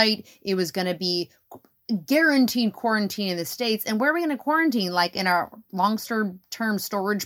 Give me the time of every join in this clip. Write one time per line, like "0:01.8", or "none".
none